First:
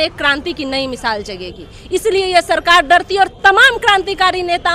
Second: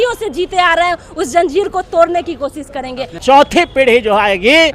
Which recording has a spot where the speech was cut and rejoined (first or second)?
second